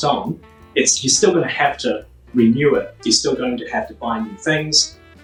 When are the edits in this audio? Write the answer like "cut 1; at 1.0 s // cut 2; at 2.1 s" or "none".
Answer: none